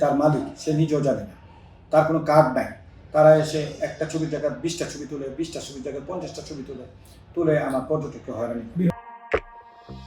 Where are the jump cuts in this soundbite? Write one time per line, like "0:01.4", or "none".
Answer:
0:08.9